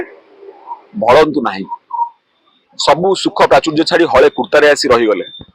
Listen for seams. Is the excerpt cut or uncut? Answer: cut